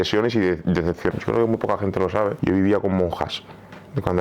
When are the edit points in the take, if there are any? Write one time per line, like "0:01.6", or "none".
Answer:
0:01.1
0:02.4